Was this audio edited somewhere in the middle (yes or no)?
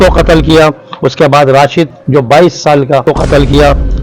yes